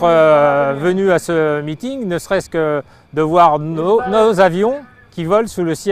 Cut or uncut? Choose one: uncut